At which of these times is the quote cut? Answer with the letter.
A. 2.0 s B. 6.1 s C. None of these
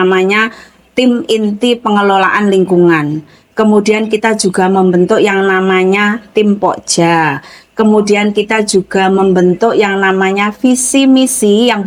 C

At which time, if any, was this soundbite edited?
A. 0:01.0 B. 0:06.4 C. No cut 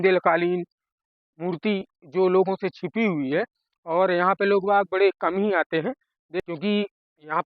B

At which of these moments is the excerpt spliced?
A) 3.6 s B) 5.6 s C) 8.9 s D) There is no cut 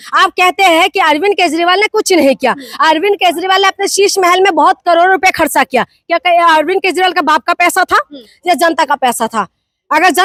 D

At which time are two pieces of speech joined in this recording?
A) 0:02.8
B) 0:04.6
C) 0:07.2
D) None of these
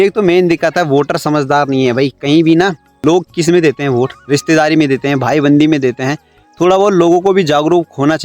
A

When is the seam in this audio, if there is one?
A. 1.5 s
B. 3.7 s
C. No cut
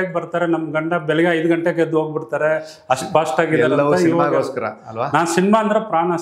C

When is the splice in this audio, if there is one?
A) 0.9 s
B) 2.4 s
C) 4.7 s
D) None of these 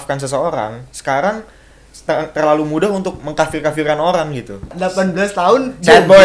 C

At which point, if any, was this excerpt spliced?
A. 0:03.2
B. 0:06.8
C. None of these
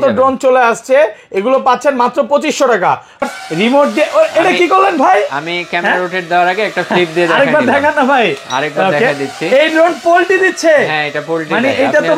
A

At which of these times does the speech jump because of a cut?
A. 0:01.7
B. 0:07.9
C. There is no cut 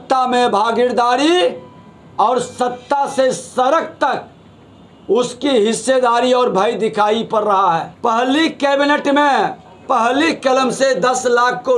B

